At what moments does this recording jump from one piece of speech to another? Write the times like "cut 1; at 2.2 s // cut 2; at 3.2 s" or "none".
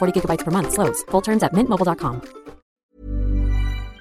cut 1; at 2.9 s